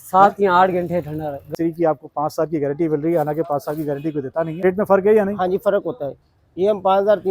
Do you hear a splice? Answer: yes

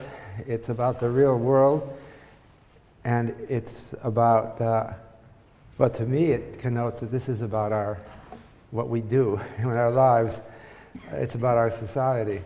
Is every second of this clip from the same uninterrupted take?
yes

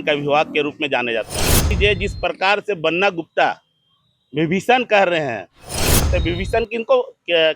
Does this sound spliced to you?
yes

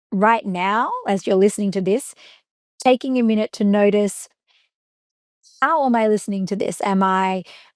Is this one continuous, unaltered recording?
yes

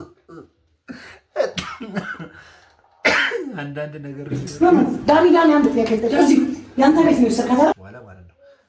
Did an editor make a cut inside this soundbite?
yes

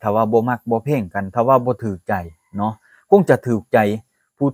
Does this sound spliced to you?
no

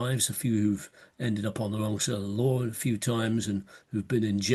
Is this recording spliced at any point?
no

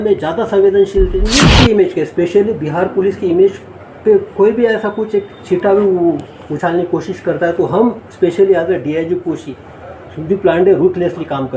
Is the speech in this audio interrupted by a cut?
yes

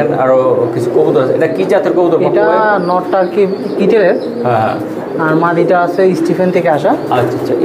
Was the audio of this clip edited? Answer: no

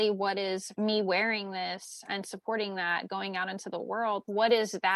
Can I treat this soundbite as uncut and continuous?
yes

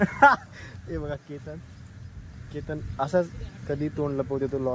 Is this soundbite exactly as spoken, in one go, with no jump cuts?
yes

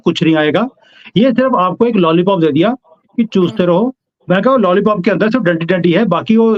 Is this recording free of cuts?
yes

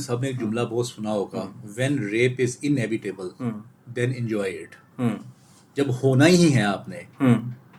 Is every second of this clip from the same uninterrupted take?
yes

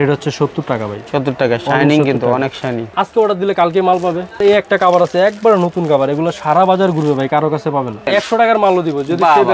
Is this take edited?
yes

